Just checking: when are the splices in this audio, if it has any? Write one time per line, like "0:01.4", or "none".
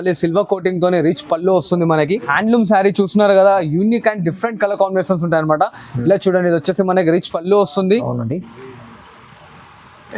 0:02.3